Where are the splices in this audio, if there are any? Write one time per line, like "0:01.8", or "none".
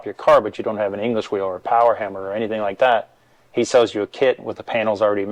none